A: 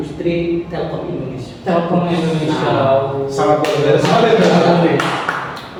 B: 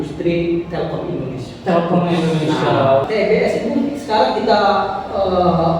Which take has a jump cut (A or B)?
B